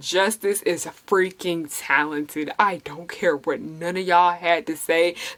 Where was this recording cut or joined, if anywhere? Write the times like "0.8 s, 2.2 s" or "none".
none